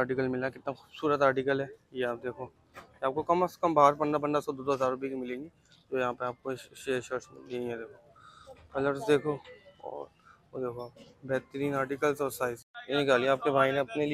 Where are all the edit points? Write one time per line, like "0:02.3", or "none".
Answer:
none